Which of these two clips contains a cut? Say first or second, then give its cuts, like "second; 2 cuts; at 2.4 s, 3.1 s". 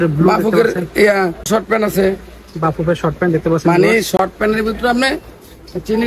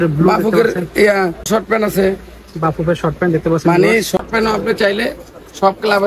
second; 1 cut; at 4.2 s